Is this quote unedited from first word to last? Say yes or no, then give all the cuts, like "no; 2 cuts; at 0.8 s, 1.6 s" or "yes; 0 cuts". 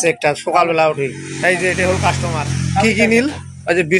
yes; 0 cuts